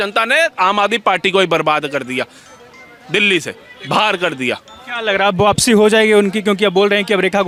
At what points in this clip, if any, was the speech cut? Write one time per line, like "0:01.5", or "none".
none